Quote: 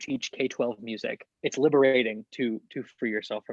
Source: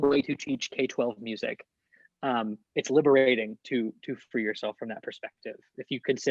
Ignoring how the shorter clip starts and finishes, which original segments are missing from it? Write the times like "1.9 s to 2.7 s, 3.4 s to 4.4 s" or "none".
1.7 s to 2.6 s